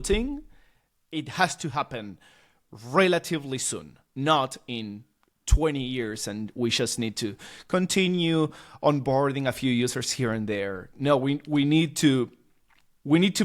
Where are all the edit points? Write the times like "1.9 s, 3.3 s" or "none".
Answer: none